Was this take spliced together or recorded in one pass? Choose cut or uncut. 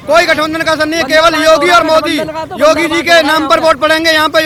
uncut